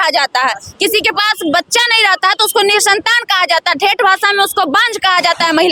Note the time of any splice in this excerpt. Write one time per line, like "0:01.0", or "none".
none